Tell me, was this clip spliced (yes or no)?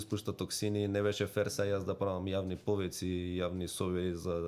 no